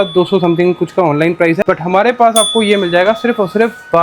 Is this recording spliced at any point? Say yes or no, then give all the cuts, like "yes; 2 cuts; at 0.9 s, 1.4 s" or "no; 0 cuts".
yes; 1 cut; at 1.6 s